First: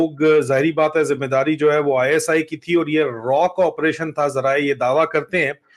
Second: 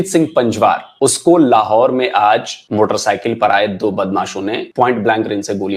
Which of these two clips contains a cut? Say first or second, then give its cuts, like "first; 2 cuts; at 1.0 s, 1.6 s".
second; 3 cuts; at 0.9 s, 2.6 s, 4.6 s